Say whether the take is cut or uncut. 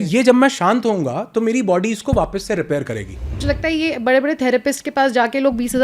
cut